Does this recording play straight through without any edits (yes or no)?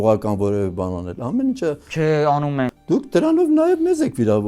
no